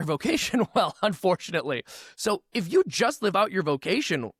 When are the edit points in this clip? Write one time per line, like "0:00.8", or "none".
none